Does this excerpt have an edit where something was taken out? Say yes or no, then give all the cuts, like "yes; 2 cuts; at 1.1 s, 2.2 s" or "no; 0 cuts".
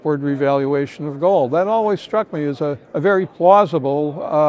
yes; 1 cut; at 3.1 s